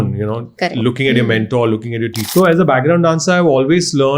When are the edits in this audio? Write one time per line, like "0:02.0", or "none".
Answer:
0:02.2